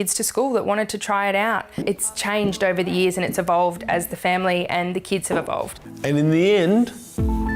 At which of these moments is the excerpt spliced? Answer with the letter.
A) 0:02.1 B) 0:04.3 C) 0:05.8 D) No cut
C